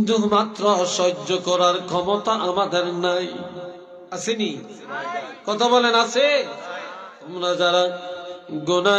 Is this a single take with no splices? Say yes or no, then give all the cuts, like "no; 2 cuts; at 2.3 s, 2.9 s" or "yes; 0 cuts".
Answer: no; 1 cut; at 6.8 s